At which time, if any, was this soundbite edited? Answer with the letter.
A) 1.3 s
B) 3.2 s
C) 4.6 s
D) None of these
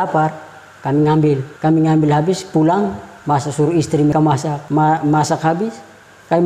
D